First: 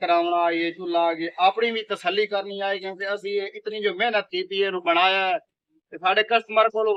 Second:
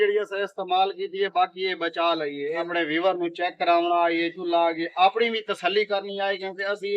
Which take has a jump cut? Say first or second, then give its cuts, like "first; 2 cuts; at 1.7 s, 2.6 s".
second; 1 cut; at 2.7 s